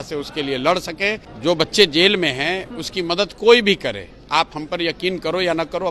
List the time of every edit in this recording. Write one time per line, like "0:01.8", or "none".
0:01.3